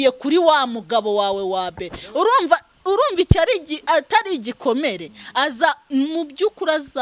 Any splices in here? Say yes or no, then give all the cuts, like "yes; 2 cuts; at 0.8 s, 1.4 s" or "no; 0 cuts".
no; 0 cuts